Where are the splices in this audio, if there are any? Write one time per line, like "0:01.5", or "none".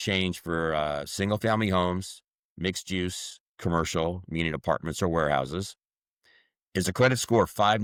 none